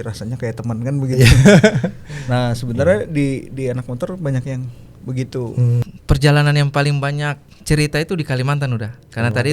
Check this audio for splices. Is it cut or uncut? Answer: cut